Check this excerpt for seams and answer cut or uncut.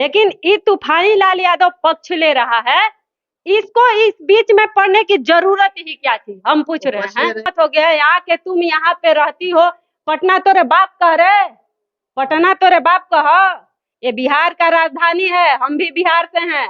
cut